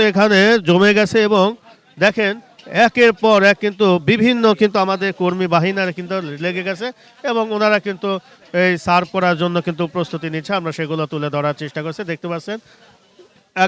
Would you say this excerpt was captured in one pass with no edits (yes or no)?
yes